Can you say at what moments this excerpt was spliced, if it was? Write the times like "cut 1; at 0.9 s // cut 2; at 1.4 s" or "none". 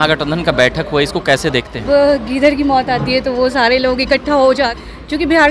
cut 1; at 1.8 s // cut 2; at 4.7 s